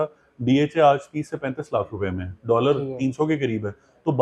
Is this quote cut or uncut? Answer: uncut